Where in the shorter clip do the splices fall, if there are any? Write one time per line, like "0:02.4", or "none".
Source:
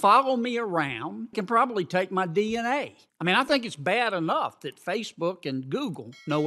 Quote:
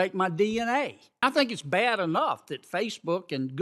0:01.2